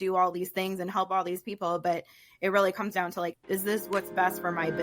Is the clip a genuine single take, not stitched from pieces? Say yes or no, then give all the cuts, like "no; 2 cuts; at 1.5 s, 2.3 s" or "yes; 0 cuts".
no; 1 cut; at 3.4 s